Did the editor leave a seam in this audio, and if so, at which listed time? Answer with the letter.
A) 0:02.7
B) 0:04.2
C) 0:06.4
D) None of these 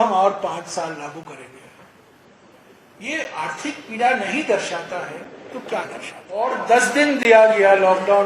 C